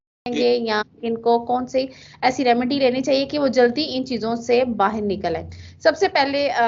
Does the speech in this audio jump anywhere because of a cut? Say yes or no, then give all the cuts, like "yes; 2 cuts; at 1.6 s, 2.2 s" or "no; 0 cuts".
no; 0 cuts